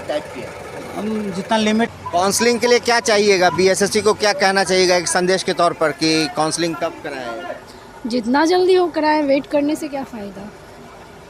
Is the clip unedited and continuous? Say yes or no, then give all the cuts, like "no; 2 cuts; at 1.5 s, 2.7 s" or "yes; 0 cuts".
no; 1 cut; at 1.9 s